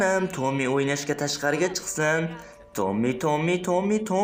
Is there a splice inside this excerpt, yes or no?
no